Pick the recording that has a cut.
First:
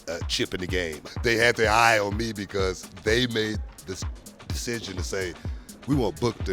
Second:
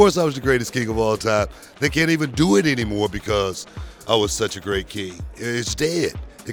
first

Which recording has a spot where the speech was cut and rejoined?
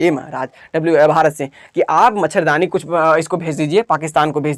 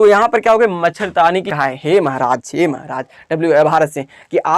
second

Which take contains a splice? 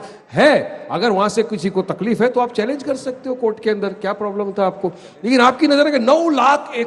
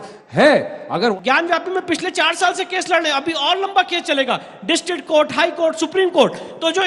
second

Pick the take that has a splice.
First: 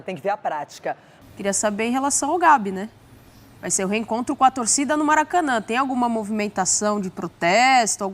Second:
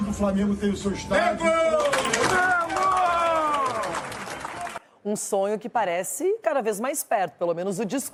first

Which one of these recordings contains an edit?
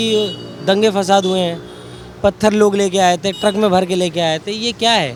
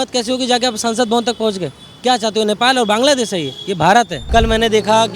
second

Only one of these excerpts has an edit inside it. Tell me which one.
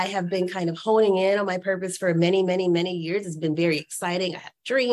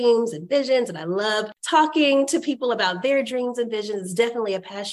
second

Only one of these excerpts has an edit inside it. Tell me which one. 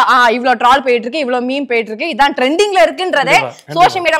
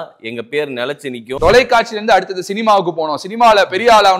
second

